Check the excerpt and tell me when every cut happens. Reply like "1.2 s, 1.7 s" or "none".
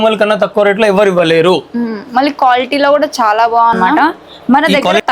3.8 s